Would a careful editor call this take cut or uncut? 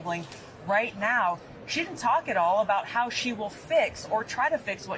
uncut